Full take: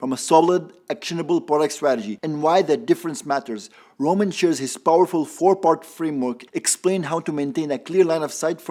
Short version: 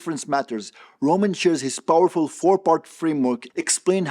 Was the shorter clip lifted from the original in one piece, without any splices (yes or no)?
yes